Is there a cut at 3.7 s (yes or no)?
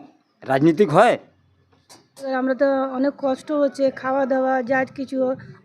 no